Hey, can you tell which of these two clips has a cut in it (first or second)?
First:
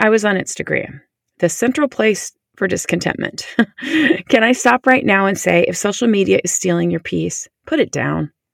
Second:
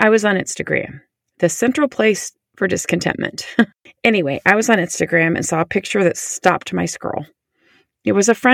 second